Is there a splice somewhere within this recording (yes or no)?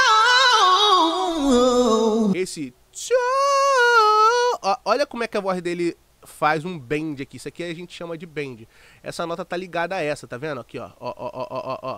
yes